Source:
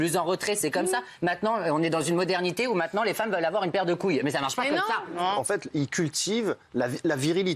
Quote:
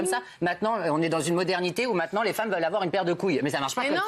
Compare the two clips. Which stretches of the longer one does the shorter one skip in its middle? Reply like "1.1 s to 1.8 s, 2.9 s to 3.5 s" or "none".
none